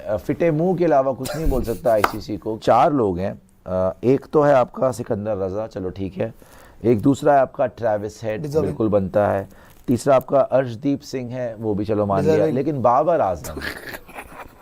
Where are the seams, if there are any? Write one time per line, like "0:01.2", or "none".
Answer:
0:02.6